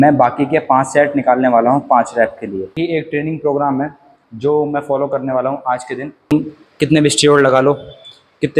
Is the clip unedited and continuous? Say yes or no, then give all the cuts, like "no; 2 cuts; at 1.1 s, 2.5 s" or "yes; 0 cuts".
no; 2 cuts; at 2.7 s, 6.3 s